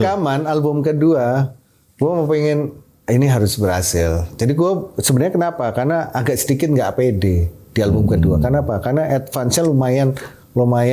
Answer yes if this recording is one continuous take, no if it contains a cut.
yes